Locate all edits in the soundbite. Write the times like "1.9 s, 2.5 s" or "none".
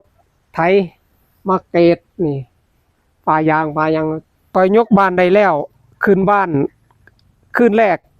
4.4 s